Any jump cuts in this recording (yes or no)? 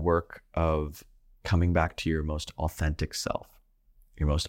no